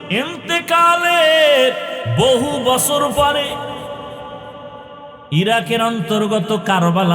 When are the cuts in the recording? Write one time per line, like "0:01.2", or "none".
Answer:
0:02.0

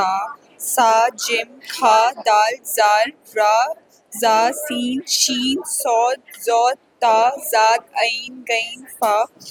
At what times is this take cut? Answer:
none

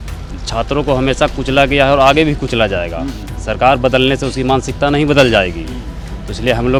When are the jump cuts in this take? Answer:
none

